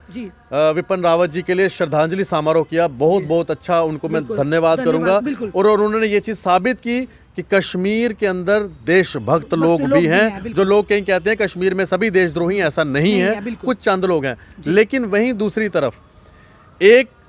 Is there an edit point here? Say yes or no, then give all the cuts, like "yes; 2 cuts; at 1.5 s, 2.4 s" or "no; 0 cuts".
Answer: no; 0 cuts